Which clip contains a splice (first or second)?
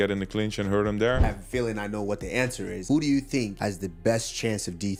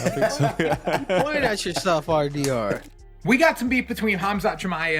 second